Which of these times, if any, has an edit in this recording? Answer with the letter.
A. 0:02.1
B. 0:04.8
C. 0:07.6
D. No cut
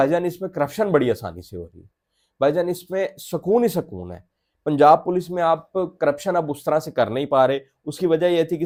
D